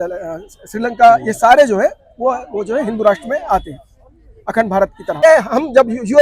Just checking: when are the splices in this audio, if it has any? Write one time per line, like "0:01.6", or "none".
0:05.2